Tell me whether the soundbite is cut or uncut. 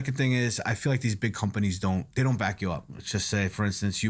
cut